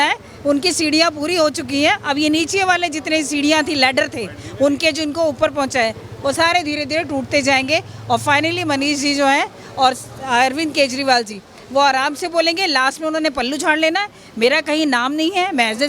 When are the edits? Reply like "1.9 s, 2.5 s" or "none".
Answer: none